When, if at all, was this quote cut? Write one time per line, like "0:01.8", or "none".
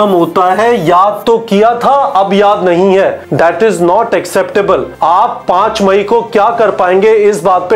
0:03.2
0:04.9